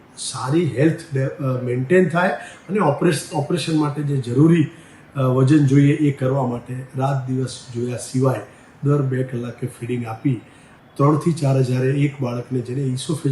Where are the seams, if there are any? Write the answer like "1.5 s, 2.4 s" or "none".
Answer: 10.8 s

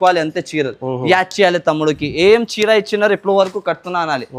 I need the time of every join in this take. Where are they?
none

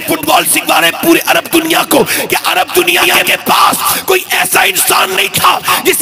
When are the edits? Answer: none

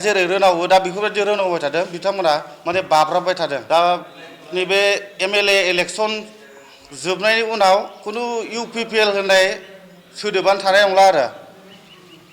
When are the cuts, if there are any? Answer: 3.6 s

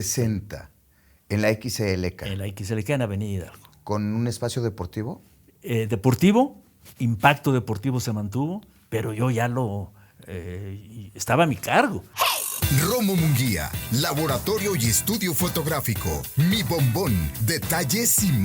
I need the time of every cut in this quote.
12.0 s

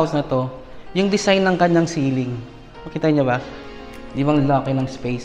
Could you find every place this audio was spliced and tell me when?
3.5 s

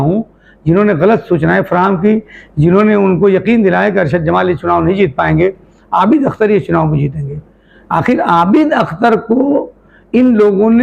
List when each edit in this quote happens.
none

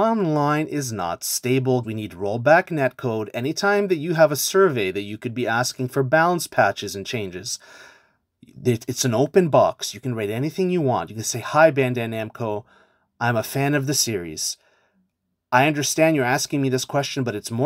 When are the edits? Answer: 1.8 s

